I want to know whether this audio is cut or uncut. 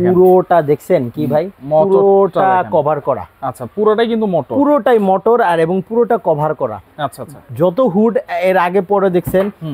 uncut